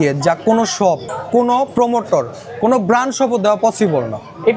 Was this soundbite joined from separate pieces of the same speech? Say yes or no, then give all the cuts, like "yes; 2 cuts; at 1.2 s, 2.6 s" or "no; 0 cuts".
yes; 1 cut; at 1.1 s